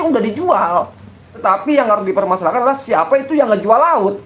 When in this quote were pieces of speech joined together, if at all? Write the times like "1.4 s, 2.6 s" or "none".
1.4 s